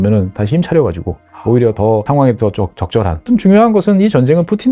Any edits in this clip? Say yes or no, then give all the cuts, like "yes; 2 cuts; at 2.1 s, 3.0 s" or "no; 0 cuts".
yes; 2 cuts; at 2.1 s, 3.2 s